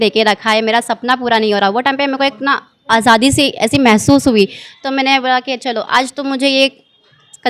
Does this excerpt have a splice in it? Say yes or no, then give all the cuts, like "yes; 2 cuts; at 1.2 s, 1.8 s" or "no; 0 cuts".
no; 0 cuts